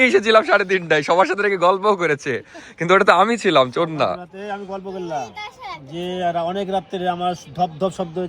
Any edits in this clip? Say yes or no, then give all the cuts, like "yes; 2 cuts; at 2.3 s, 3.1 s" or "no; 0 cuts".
no; 0 cuts